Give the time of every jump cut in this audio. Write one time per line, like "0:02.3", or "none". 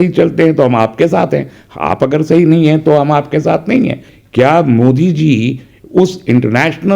0:04.1